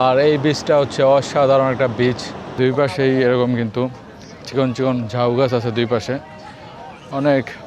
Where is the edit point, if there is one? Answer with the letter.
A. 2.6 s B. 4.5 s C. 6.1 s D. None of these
A